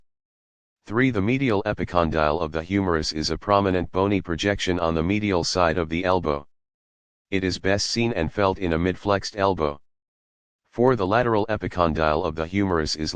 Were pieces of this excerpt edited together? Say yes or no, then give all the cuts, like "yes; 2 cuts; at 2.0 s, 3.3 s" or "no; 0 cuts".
no; 0 cuts